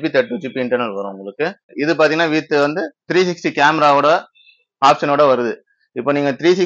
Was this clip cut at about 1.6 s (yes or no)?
yes